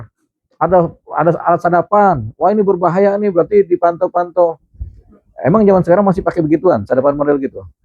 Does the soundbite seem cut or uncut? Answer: uncut